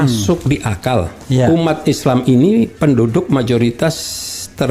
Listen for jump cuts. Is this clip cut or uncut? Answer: cut